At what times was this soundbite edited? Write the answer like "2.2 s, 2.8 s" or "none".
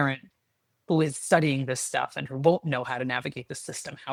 none